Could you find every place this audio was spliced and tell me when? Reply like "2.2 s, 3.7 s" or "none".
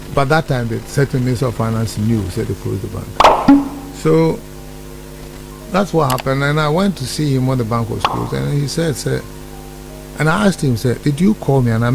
3.1 s, 3.7 s